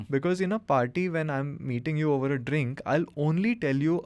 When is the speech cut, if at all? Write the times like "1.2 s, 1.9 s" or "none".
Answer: none